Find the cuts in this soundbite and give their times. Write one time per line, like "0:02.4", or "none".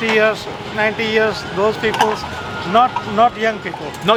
none